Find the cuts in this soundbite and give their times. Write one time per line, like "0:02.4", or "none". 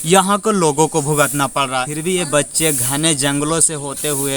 0:01.9